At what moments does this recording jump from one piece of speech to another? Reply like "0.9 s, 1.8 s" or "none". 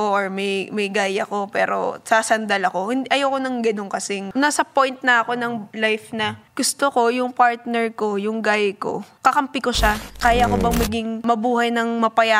4.2 s, 5.7 s, 6.4 s, 9.1 s, 10.1 s, 11.2 s